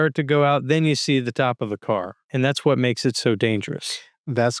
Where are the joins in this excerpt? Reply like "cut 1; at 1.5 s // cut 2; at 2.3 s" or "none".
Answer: cut 1; at 2.3 s

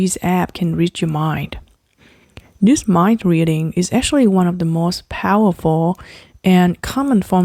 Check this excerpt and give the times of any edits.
none

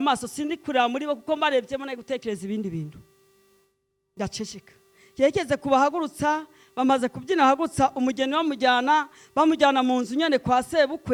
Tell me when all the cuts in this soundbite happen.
none

